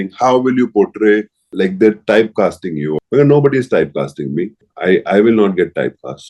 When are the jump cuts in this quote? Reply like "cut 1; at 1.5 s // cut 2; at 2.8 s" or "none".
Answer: cut 1; at 1.4 s // cut 2; at 2.9 s // cut 3; at 4.6 s